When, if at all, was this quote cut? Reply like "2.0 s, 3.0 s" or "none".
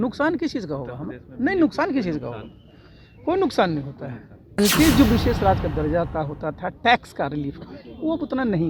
4.6 s